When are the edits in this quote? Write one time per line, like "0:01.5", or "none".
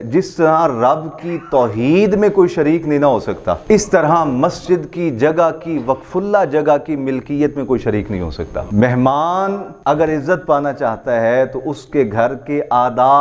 0:03.6
0:08.7
0:09.7

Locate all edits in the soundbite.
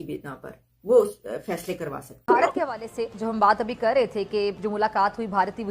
0:02.2

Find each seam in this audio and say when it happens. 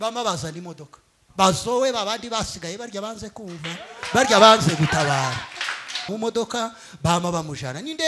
0:06.1

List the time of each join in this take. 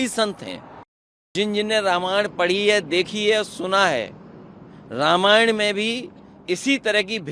0:01.3

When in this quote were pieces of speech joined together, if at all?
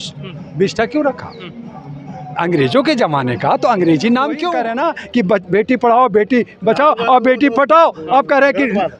0:04.7

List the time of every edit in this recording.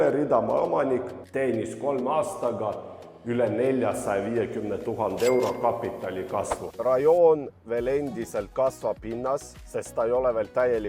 0:06.7

